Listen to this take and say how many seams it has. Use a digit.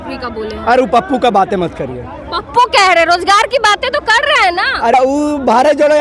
1